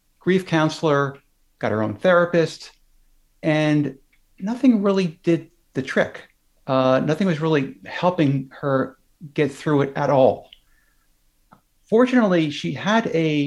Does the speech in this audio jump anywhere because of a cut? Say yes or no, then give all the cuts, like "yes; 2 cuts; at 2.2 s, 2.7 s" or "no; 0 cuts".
no; 0 cuts